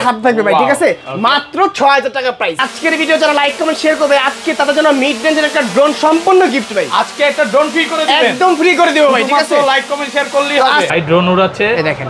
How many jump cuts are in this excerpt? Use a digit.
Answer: 2